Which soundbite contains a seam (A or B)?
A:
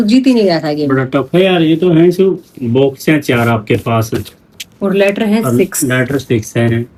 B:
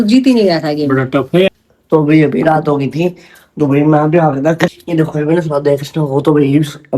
B